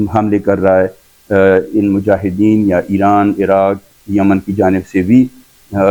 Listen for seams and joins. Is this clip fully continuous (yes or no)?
yes